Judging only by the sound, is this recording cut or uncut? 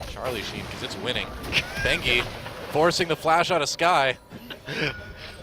cut